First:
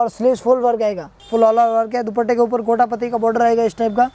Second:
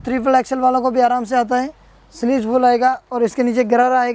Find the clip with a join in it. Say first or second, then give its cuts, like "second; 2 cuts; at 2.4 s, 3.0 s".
first; 1 cut; at 1.1 s